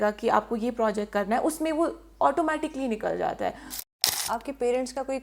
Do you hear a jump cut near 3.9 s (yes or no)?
yes